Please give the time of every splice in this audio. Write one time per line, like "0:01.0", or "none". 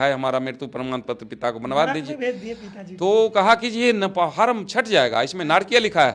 none